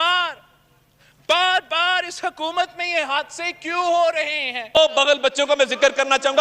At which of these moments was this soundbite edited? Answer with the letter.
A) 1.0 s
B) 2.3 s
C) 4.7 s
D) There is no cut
C